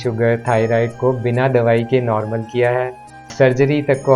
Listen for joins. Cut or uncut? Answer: cut